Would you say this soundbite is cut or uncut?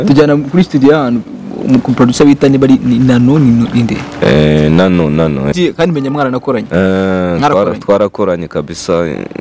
cut